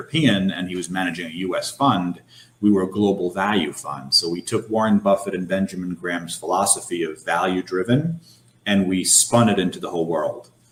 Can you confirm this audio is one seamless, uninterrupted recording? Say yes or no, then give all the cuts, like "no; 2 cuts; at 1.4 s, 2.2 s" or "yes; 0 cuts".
yes; 0 cuts